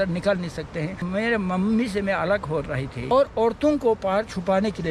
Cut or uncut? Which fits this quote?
cut